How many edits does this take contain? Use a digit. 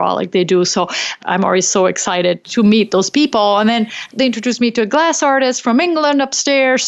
3